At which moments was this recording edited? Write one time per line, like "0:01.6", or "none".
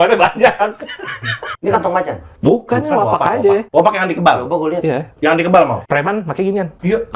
0:01.5
0:03.7